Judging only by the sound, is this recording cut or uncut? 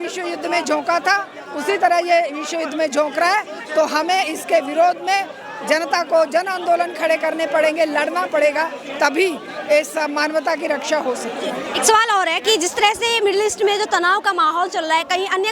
uncut